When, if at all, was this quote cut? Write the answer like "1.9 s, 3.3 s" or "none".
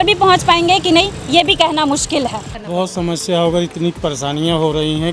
2.6 s